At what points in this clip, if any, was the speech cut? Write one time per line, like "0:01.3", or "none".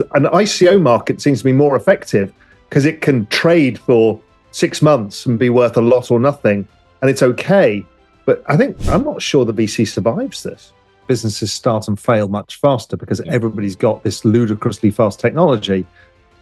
0:10.9